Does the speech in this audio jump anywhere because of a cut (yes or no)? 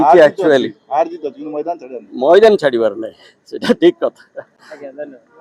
no